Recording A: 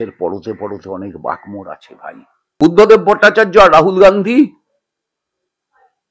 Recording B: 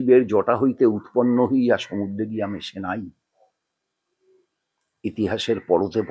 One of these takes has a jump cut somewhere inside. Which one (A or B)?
A